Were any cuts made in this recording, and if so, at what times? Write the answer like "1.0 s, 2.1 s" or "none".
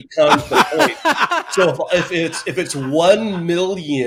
none